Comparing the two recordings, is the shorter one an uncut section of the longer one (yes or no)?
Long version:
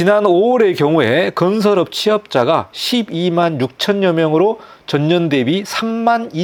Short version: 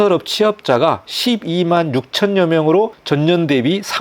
no